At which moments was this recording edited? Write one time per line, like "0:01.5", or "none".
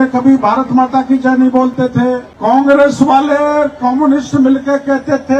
0:02.3